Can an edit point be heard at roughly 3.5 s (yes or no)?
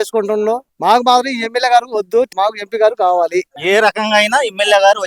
yes